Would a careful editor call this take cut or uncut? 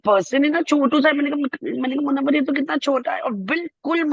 uncut